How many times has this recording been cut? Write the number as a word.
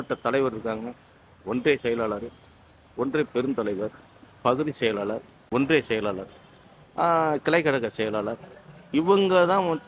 one